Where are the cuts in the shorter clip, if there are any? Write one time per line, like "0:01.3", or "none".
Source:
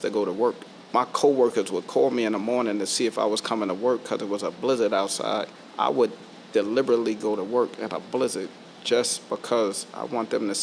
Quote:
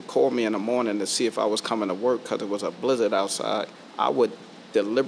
none